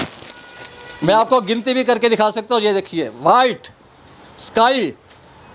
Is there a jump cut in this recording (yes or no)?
no